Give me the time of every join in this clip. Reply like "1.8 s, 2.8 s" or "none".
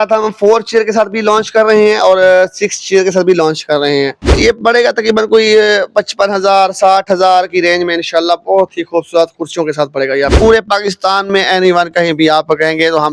4.3 s, 10.3 s